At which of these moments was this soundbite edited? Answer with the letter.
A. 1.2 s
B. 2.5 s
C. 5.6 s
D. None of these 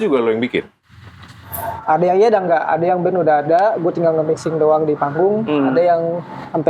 D